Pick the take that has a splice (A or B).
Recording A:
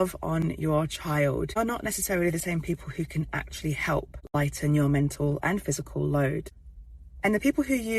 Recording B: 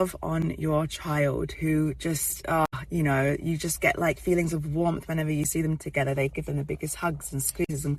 A